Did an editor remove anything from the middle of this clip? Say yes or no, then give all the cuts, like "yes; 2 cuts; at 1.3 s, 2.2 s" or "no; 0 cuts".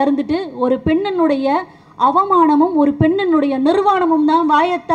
no; 0 cuts